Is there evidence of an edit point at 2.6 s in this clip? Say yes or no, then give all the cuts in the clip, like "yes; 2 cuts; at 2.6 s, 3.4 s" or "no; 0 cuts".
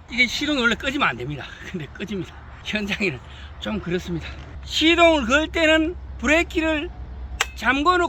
no; 1 cut; at 4.5 s